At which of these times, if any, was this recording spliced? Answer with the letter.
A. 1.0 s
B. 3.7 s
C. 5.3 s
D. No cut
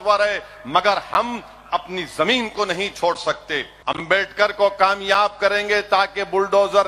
B